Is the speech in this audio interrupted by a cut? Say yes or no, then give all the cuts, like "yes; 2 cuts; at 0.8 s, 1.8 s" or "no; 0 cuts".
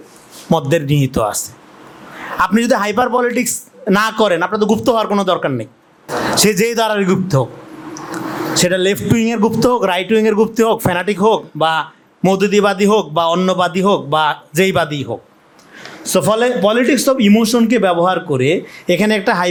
no; 0 cuts